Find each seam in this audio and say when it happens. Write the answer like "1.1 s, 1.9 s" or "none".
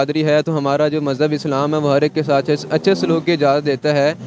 none